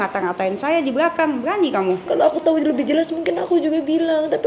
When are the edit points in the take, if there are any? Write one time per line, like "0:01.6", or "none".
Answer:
0:02.1